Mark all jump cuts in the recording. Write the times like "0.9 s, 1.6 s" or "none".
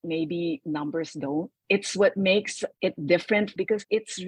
2.6 s, 3.5 s